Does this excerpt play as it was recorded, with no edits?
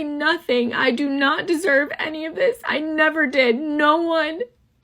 yes; 0 cuts

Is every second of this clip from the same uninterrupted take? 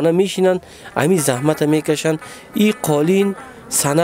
yes; 0 cuts

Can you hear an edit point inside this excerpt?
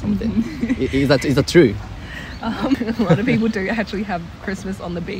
yes; 1 cut; at 2.8 s

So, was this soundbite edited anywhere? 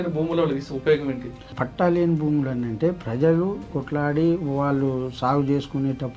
yes; 2 cuts; at 1.6 s, 3.8 s

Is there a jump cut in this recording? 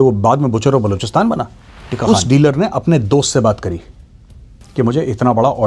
yes; 1 cut; at 2.0 s

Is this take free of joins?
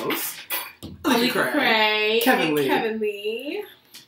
yes; 0 cuts

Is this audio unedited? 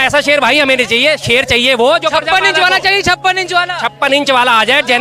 no; 1 cut; at 1.2 s

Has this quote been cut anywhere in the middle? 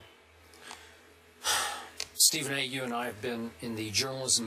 yes; 1 cut; at 2.3 s

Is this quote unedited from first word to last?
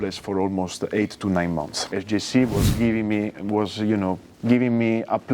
no; 1 cut; at 1.8 s

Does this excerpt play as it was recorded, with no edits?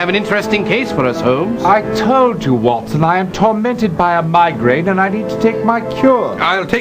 yes; 0 cuts

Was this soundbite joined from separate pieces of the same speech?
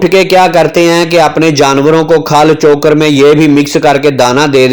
no; 0 cuts

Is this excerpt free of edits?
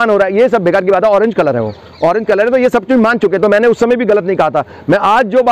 yes; 0 cuts

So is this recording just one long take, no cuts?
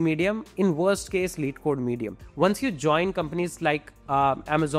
no; 1 cut; at 2.2 s

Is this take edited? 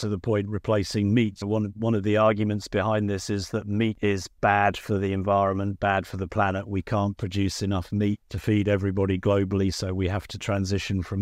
yes; 2 cuts; at 4.0 s, 8.3 s

